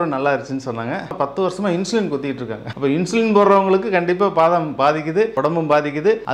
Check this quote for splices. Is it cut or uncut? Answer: cut